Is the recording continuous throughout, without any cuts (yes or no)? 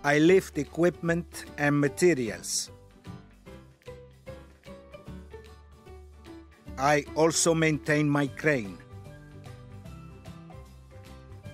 no